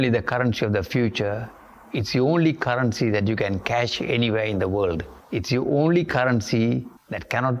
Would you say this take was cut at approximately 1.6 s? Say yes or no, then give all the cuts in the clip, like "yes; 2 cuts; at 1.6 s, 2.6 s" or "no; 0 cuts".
no; 1 cut; at 5.1 s